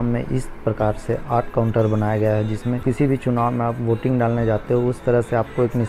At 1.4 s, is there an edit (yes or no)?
no